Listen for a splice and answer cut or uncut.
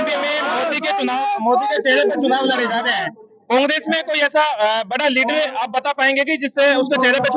uncut